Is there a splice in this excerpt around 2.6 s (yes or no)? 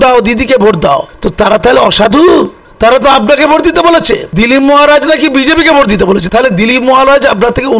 yes